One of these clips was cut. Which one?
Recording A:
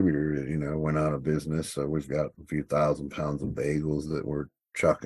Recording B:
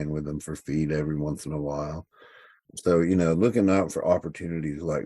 A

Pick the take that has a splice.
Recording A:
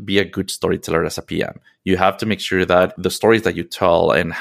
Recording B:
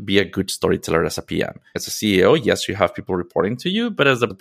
B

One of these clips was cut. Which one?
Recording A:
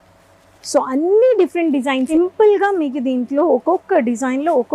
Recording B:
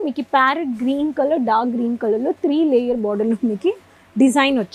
A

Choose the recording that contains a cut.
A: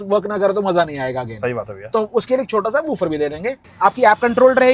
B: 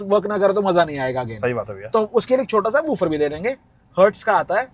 A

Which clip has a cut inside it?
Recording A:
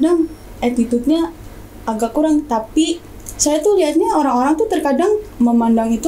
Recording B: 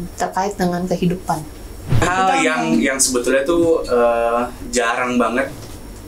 B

